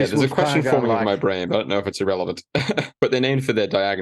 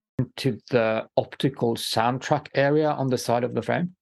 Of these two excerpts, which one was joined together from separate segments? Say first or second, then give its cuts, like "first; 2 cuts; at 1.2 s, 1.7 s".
first; 1 cut; at 2.9 s